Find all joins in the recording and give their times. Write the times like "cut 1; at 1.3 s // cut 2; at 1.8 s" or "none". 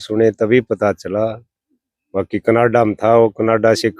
none